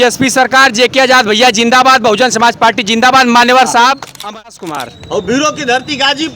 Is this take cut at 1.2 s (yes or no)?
no